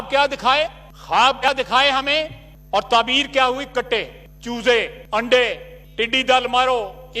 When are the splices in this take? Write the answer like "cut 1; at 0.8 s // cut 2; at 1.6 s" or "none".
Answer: cut 1; at 1.5 s